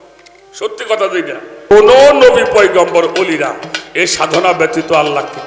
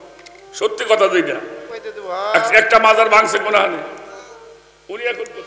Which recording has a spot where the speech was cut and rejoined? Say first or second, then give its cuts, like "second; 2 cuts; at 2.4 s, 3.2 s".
first; 1 cut; at 1.7 s